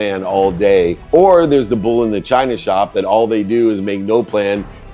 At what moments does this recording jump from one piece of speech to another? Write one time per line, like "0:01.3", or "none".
0:01.0